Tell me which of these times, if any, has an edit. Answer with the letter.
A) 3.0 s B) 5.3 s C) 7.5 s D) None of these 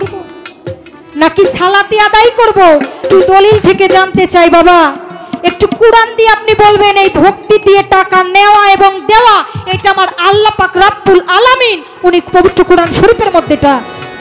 A